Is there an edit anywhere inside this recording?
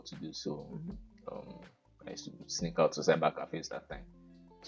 no; 0 cuts

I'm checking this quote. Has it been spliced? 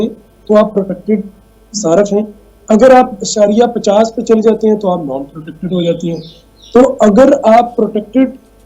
no; 0 cuts

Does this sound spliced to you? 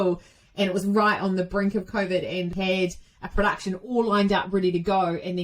yes; 1 cut; at 2.5 s

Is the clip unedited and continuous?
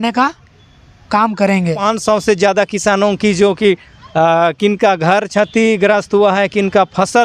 no; 1 cut; at 1.8 s

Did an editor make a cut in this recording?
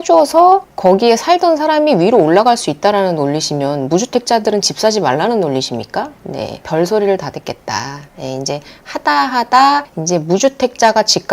yes; 1 cut; at 6.6 s

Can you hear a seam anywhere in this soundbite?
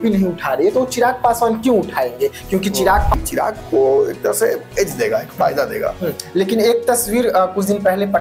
yes; 1 cut; at 3.1 s

